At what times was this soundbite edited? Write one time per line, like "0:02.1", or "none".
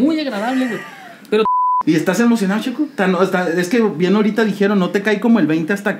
0:01.5